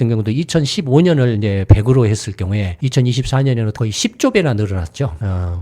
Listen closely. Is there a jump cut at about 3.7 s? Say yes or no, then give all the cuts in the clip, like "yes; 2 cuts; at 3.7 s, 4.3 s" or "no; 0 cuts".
yes; 2 cuts; at 2.7 s, 3.7 s